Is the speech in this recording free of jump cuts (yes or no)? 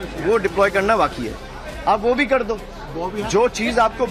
yes